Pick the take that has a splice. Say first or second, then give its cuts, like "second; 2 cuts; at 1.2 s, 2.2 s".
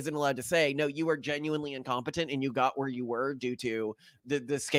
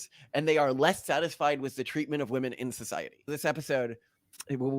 second; 1 cut; at 3.3 s